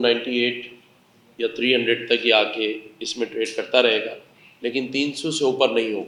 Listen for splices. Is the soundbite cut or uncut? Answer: uncut